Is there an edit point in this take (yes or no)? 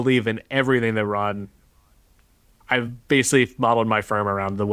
no